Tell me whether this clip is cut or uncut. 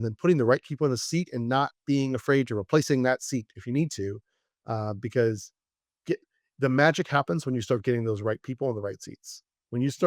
uncut